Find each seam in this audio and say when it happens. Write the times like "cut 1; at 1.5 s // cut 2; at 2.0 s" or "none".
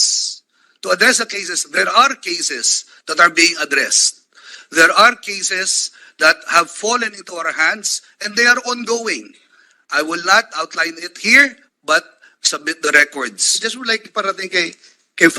cut 1; at 13.4 s